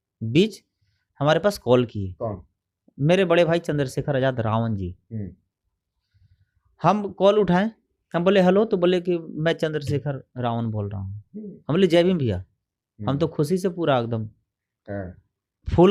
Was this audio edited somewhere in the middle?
no; 0 cuts

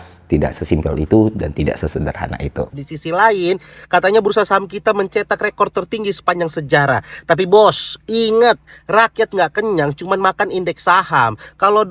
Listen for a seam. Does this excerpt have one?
yes; 1 cut; at 2.7 s

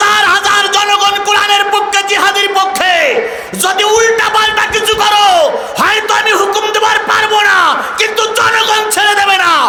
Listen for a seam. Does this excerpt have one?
no; 0 cuts

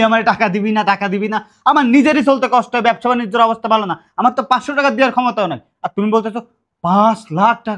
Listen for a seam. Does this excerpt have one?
no; 0 cuts

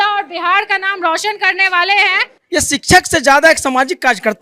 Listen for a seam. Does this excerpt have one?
yes; 1 cut; at 2.3 s

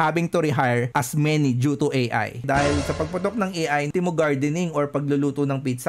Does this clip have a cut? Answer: yes; 2 cuts; at 2.4 s, 3.9 s

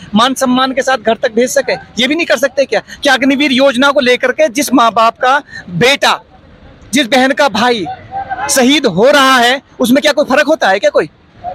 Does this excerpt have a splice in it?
no; 0 cuts

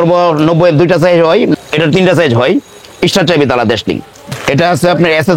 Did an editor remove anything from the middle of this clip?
yes; 2 cuts; at 1.5 s, 4.3 s

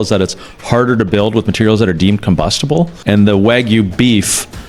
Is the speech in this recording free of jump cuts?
no; 1 cut; at 3.0 s

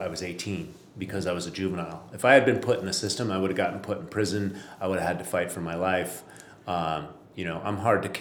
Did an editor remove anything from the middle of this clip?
no; 0 cuts

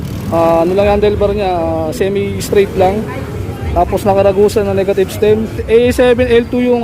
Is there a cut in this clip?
yes; 1 cut; at 5.6 s

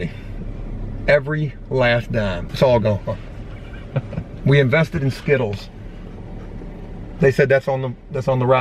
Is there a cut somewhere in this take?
yes; 1 cut; at 2.4 s

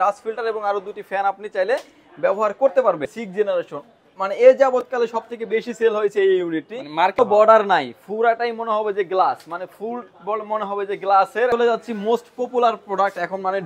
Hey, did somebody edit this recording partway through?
yes; 3 cuts; at 3.2 s, 7.1 s, 11.5 s

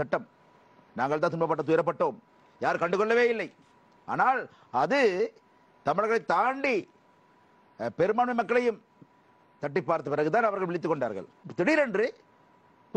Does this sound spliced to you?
yes; 1 cut; at 11.4 s

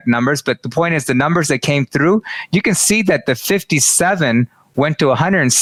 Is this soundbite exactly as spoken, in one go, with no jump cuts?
yes; 0 cuts

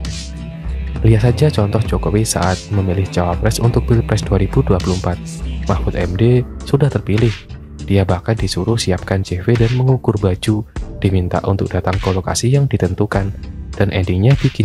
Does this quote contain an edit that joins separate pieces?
no; 0 cuts

